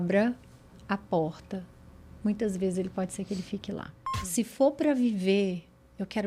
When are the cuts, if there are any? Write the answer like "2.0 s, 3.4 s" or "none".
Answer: 4.0 s